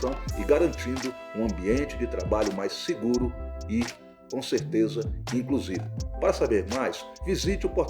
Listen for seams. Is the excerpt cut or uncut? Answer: uncut